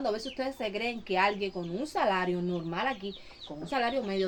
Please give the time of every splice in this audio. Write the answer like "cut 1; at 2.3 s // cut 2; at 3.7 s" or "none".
none